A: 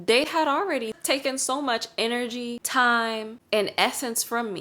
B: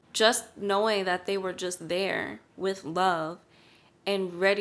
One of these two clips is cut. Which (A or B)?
A